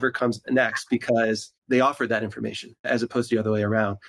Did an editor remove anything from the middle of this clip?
yes; 2 cuts; at 1.5 s, 2.9 s

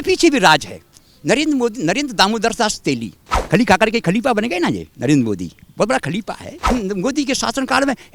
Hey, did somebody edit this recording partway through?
yes; 2 cuts; at 3.3 s, 6.7 s

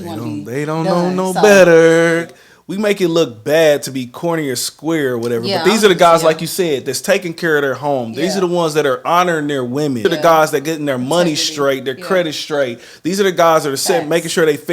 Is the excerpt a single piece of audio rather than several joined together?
no; 2 cuts; at 2.3 s, 10.0 s

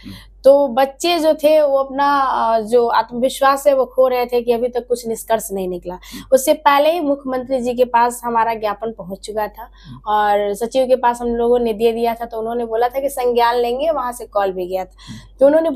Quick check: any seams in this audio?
no; 0 cuts

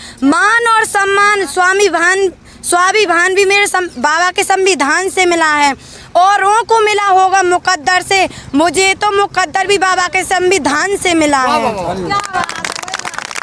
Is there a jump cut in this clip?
no; 0 cuts

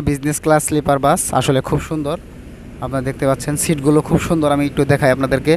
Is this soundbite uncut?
yes; 0 cuts

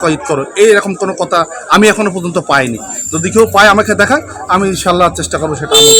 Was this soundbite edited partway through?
no; 0 cuts

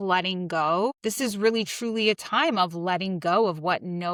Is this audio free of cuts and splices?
yes; 0 cuts

